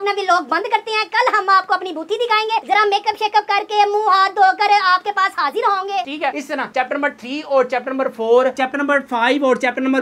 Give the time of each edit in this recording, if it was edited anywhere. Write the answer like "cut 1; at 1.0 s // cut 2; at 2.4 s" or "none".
cut 1; at 6.1 s